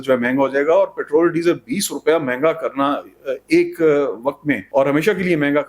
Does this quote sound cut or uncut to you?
cut